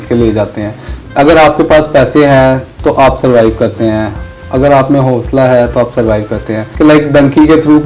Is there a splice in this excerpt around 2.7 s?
no; 1 cut; at 6.6 s

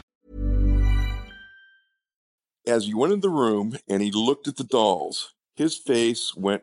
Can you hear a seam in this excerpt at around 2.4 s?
yes; 1 cut; at 2.4 s

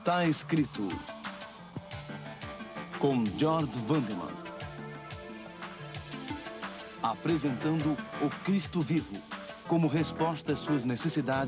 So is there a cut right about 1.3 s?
no; 1 cut; at 9.1 s

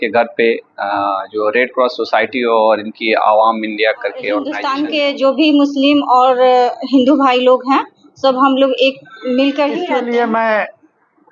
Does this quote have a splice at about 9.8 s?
yes; 2 cuts; at 4.6 s, 9.8 s

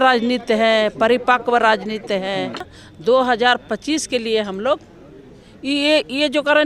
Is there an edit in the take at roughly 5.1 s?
no; 1 cut; at 2.8 s

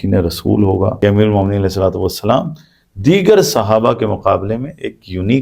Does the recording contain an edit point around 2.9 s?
no; 1 cut; at 0.9 s

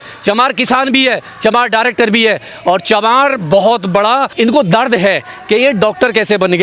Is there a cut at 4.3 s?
yes; 1 cut; at 4.3 s

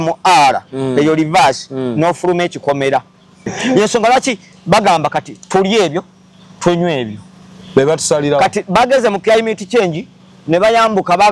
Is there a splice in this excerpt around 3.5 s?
yes; 1 cut; at 3.5 s

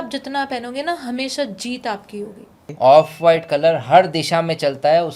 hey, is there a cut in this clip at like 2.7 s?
yes; 1 cut; at 2.7 s

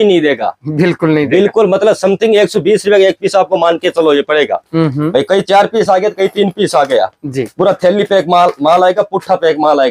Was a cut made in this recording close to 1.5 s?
no; 0 cuts

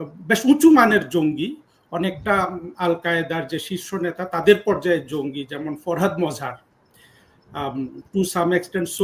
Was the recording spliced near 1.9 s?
no; 0 cuts

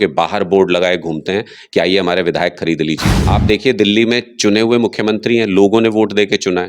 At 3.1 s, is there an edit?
yes; 1 cut; at 3.1 s

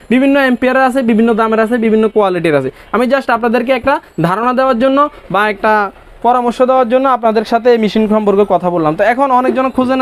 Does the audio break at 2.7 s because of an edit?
no; 0 cuts

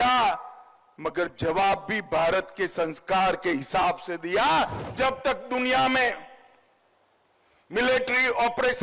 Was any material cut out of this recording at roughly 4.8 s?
yes; 1 cut; at 4.8 s

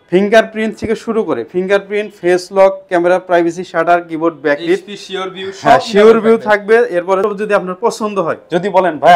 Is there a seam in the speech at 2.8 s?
no; 1 cut; at 7.2 s

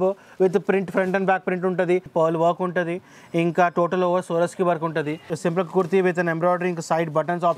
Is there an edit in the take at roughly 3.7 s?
no; 2 cuts; at 2.1 s, 5.3 s

